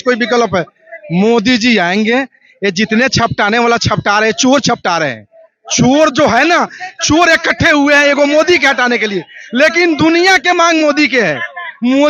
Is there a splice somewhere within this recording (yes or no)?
no